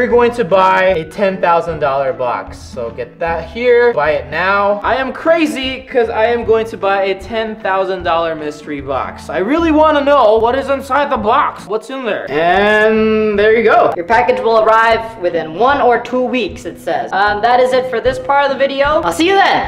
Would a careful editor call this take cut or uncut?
uncut